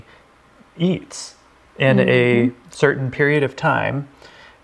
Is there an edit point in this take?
no; 0 cuts

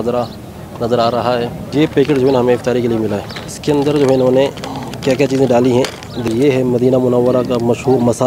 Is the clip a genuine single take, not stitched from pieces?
no; 3 cuts; at 1.7 s, 3.5 s, 6.3 s

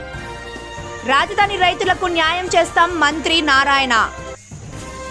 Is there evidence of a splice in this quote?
no; 0 cuts

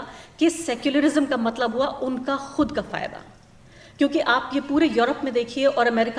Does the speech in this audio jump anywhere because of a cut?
no; 0 cuts

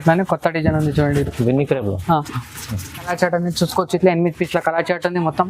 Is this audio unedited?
no; 1 cut; at 3.1 s

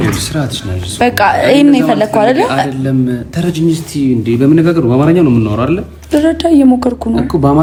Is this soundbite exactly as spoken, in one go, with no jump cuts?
yes; 0 cuts

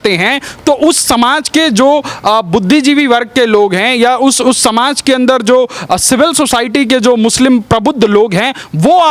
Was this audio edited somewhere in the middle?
no; 0 cuts

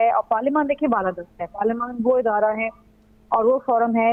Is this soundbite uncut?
yes; 0 cuts

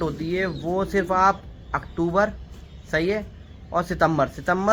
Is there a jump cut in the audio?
no; 0 cuts

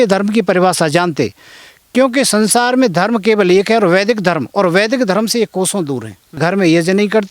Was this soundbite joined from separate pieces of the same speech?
yes; 1 cut; at 6.4 s

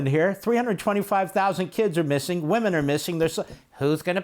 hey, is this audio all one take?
yes; 0 cuts

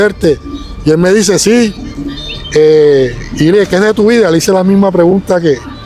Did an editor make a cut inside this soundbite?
no; 0 cuts

